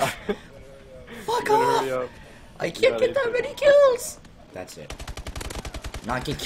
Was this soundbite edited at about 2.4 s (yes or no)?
no